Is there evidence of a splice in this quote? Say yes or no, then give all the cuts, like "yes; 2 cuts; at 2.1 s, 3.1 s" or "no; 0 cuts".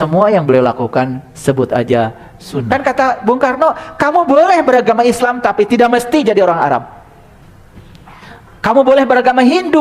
yes; 1 cut; at 2.6 s